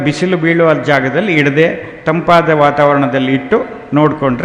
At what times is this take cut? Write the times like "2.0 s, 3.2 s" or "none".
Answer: none